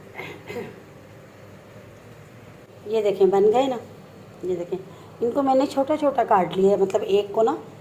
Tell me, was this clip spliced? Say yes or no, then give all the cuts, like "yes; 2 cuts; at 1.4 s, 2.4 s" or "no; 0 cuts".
yes; 1 cut; at 2.7 s